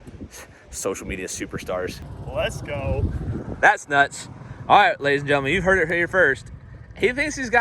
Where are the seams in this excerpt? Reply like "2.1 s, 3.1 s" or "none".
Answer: 2.1 s